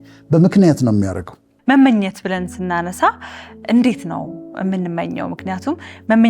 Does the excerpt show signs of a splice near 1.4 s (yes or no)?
yes